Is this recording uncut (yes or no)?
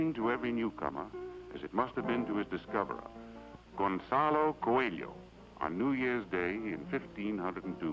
yes